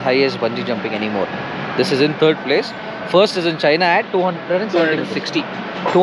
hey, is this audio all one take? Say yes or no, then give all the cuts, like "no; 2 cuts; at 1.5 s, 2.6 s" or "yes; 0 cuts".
yes; 0 cuts